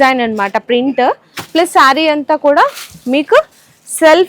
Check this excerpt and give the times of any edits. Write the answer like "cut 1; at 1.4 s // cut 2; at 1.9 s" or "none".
none